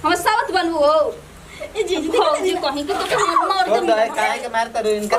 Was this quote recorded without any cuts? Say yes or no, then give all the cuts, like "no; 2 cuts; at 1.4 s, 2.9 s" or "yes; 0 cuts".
yes; 0 cuts